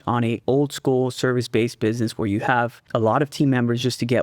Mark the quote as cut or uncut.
cut